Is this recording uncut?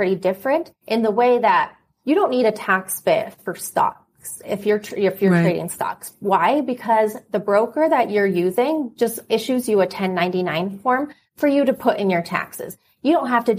yes; 0 cuts

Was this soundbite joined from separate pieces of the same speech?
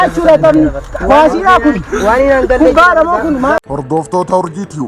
yes; 1 cut; at 3.6 s

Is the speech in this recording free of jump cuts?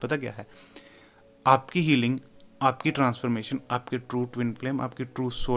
yes; 0 cuts

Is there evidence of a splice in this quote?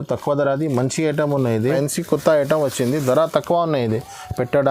yes; 1 cut; at 1.6 s

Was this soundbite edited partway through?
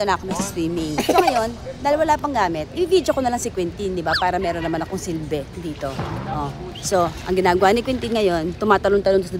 no; 0 cuts

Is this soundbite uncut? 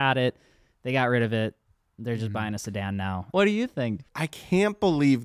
no; 2 cuts; at 3.3 s, 4.0 s

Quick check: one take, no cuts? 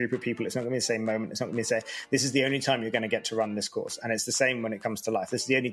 yes; 0 cuts

